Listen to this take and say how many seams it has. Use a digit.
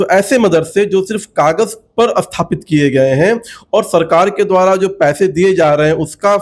0